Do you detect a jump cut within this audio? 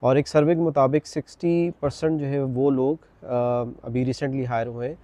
no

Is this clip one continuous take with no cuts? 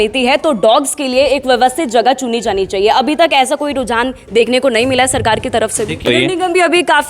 no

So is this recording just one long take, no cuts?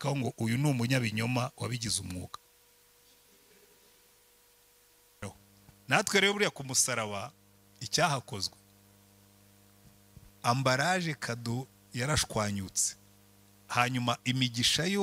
no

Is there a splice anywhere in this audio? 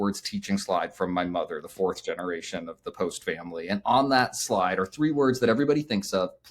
no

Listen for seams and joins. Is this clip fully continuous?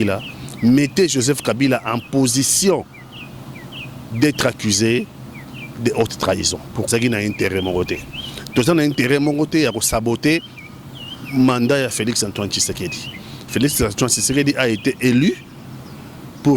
no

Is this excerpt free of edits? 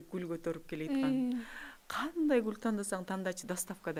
yes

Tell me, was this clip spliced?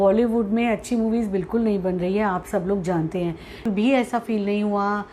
yes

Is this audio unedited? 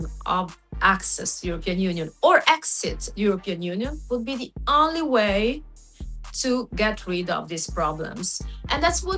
yes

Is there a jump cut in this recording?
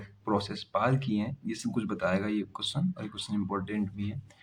no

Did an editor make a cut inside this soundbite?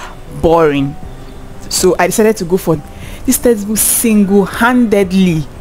yes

